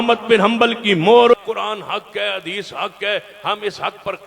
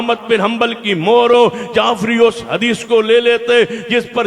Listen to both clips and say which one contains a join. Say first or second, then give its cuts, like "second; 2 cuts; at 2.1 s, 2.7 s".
first; 1 cut; at 1.3 s